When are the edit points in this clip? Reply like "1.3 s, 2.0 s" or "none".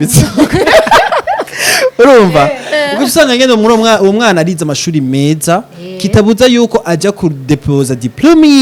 none